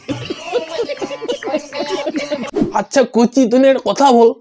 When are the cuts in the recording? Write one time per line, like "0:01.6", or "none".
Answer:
0:02.6